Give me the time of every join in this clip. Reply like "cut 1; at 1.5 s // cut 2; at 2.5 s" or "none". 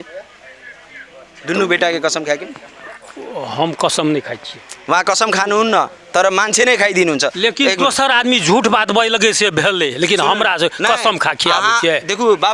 none

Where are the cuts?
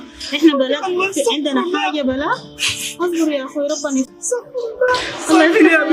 none

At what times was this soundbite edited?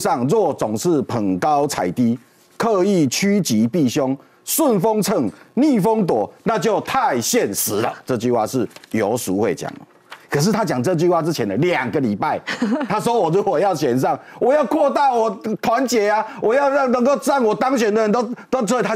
cut 1; at 8.0 s

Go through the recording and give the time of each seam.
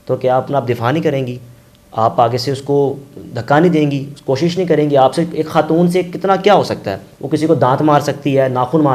none

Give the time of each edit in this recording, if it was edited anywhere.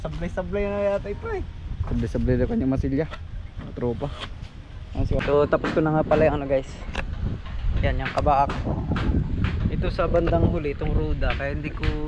cut 1; at 5.2 s

